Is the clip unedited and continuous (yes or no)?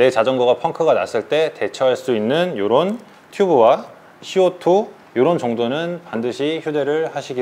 yes